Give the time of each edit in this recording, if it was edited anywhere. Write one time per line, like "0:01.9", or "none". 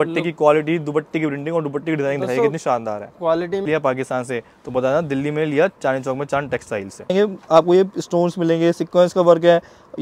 0:03.6
0:07.1